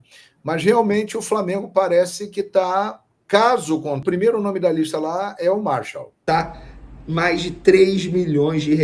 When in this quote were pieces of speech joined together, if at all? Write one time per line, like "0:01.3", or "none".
0:04.0
0:06.2

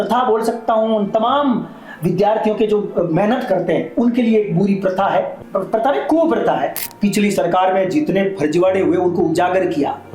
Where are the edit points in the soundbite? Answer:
0:05.4
0:06.8

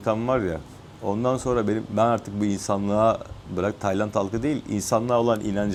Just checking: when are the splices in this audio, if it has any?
none

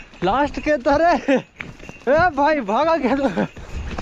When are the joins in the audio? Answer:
none

